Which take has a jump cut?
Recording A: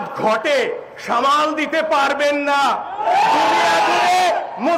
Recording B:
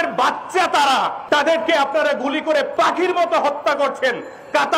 B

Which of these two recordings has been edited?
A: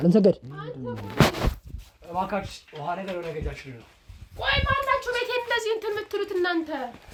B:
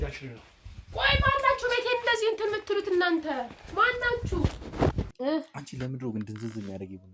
B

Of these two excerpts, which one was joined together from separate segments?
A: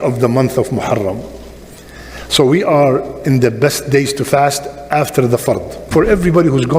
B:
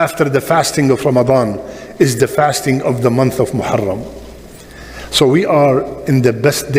A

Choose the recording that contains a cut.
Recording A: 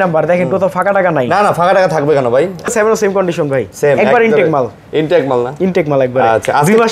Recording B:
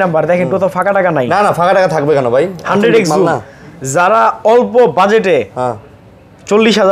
A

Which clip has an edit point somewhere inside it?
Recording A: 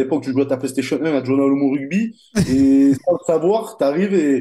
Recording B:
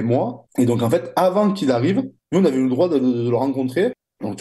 B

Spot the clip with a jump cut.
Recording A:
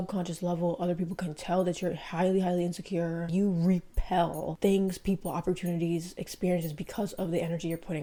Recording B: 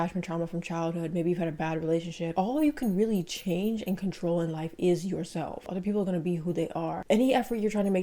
B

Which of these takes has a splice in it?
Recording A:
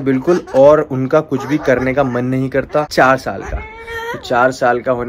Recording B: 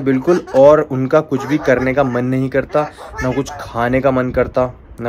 A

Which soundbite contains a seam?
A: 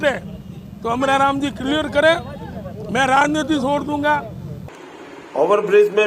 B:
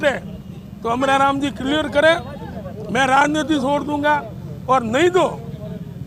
A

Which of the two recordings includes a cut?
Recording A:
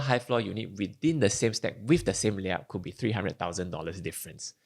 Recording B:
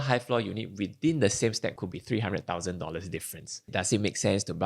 B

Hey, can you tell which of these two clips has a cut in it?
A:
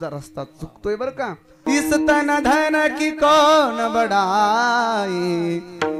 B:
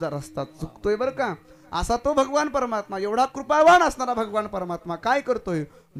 A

